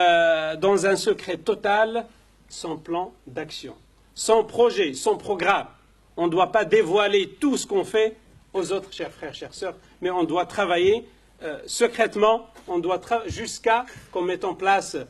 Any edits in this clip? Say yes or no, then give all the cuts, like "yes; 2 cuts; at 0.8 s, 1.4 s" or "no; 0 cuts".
no; 0 cuts